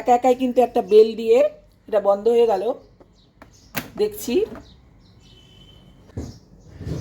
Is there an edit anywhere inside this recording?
yes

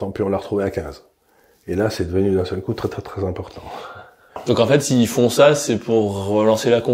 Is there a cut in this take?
yes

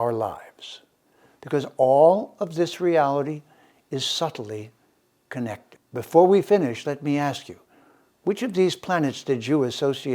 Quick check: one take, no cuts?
no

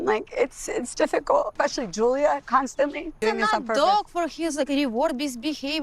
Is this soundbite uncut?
no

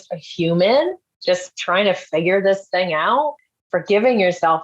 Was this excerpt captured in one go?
no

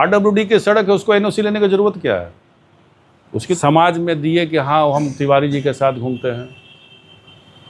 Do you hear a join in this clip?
yes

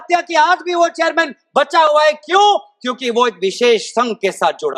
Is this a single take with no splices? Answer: yes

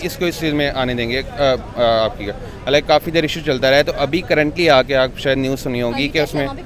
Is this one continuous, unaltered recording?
yes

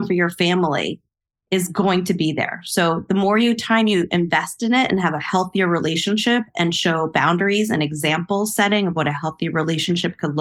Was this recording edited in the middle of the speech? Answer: no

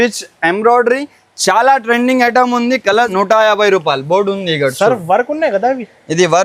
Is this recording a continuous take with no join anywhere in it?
no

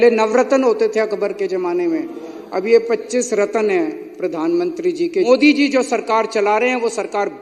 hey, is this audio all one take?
no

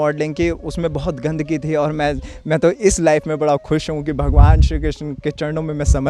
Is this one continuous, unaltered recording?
yes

